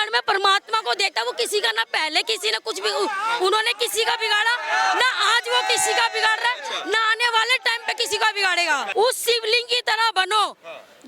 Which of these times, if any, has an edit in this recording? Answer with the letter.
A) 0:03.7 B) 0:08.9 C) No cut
B